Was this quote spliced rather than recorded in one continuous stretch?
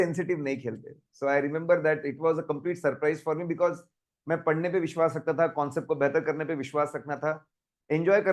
no; 0 cuts

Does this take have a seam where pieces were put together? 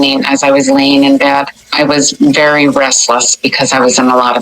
yes; 1 cut; at 1.8 s

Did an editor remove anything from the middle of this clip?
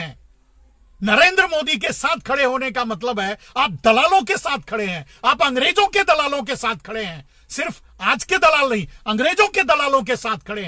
no; 0 cuts

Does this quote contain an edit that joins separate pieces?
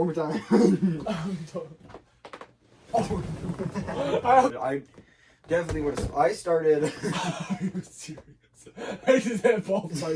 yes; 1 cut; at 4.6 s

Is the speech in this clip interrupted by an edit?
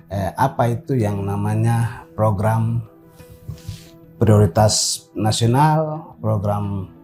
no; 0 cuts

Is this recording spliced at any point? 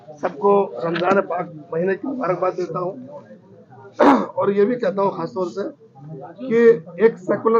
no; 0 cuts

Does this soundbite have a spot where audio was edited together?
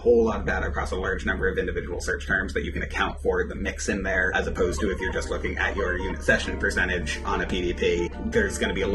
no; 0 cuts

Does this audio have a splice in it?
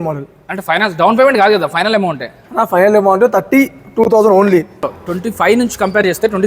yes; 1 cut; at 4.9 s

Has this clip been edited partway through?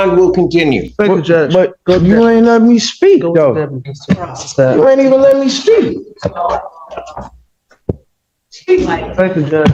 no; 0 cuts

